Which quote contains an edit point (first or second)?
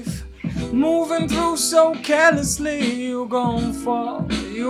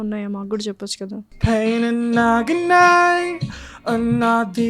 second